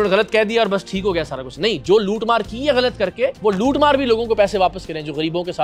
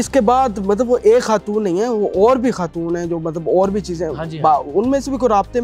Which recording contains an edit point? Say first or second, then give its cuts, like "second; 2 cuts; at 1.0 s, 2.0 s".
first; 1 cut; at 3.4 s